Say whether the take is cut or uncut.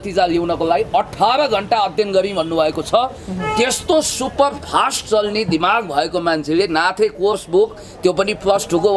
uncut